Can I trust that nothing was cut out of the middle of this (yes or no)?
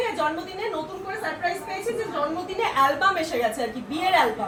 yes